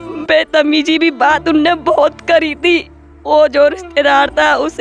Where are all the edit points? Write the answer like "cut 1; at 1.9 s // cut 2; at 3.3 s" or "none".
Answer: cut 1; at 3.1 s